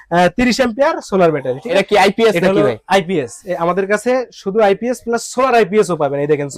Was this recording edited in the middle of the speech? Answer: yes; 1 cut; at 1.8 s

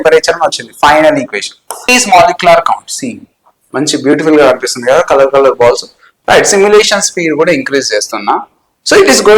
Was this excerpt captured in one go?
no; 1 cut; at 1.8 s

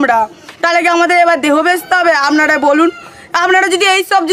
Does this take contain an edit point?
no; 0 cuts

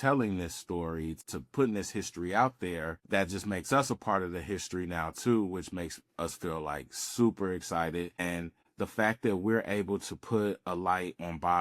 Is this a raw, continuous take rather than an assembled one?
no; 3 cuts; at 1.2 s, 3.0 s, 8.2 s

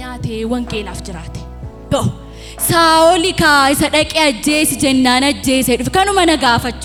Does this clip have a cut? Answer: no; 0 cuts

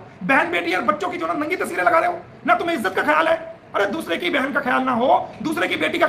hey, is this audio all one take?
yes; 0 cuts

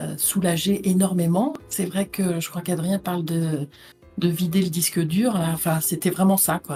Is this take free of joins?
yes; 0 cuts

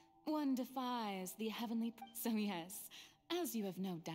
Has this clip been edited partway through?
yes; 1 cut; at 2.0 s

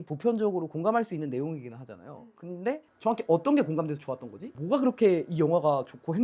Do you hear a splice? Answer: yes; 2 cuts; at 2.9 s, 4.5 s

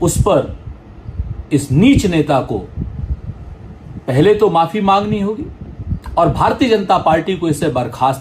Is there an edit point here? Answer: no; 0 cuts

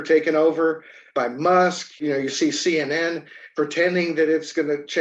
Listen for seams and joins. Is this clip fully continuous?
yes; 0 cuts

